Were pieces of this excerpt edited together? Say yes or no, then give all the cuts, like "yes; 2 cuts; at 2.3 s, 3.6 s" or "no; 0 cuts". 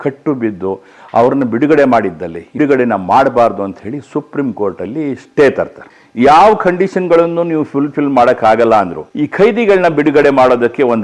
yes; 3 cuts; at 2.5 s, 6.0 s, 9.0 s